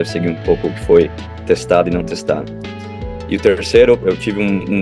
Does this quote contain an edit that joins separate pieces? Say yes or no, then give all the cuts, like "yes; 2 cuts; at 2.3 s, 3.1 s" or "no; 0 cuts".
no; 0 cuts